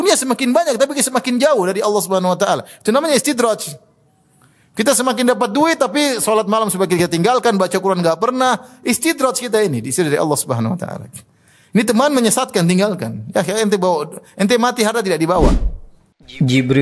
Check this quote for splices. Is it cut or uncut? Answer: cut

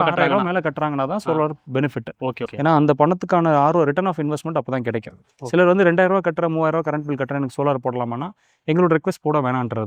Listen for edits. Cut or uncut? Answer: uncut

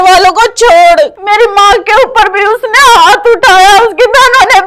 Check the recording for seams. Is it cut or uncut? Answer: cut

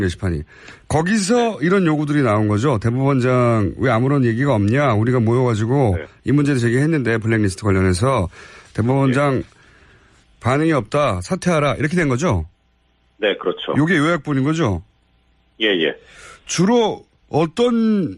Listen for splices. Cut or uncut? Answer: cut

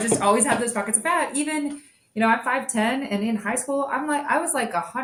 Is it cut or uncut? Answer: uncut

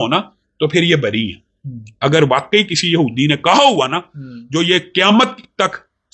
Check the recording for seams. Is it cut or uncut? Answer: uncut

